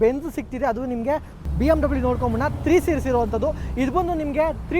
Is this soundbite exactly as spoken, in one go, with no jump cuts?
no; 1 cut; at 1.4 s

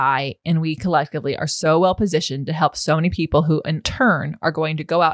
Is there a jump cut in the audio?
yes; 1 cut; at 3.8 s

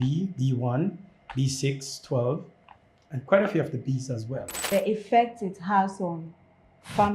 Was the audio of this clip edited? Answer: yes; 1 cut; at 4.5 s

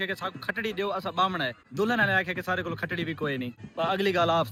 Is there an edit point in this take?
no; 0 cuts

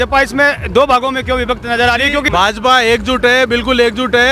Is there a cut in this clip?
yes; 1 cut; at 2.3 s

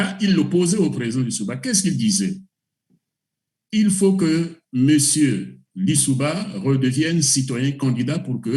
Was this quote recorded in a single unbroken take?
yes; 0 cuts

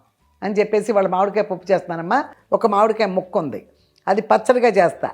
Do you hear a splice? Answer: yes; 1 cut; at 2.4 s

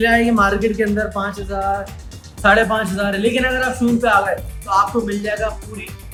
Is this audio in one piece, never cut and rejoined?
yes; 0 cuts

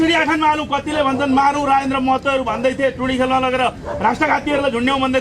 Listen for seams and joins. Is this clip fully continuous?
yes; 0 cuts

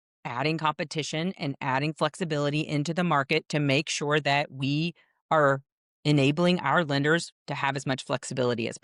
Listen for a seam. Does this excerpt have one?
no; 0 cuts

